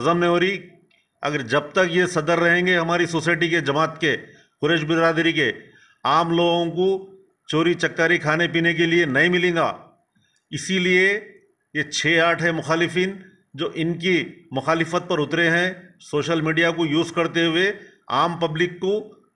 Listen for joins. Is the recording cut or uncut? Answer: uncut